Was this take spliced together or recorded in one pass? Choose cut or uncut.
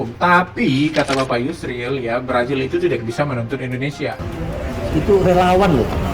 cut